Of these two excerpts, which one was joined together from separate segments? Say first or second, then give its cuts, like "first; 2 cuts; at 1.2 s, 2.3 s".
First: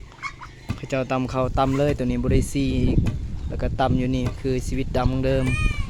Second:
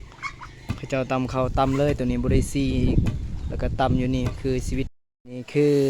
second; 1 cut; at 4.9 s